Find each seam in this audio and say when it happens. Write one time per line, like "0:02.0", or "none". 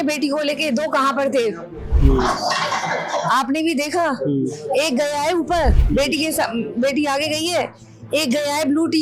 none